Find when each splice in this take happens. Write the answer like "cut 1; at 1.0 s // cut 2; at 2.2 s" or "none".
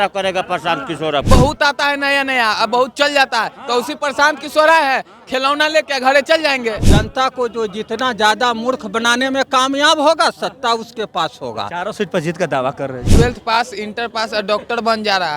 cut 1; at 1.3 s // cut 2; at 6.8 s // cut 3; at 13.1 s